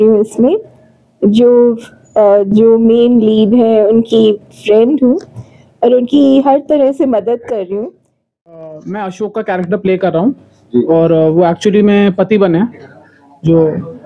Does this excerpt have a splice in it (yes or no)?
yes